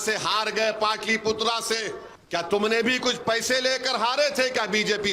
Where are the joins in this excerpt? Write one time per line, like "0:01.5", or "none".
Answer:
0:02.1